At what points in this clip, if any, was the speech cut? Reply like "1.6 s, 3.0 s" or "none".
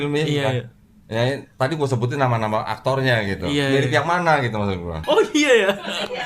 4.9 s